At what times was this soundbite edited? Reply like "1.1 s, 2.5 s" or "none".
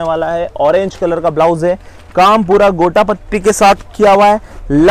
none